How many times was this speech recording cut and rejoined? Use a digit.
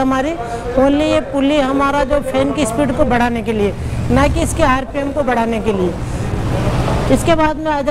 0